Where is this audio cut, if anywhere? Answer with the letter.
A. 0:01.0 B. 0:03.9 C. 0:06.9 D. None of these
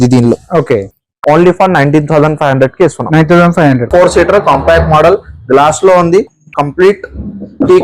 B